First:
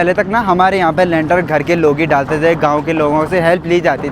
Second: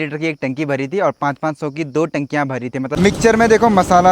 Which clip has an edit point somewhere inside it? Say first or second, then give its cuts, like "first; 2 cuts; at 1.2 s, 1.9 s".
second; 1 cut; at 3.0 s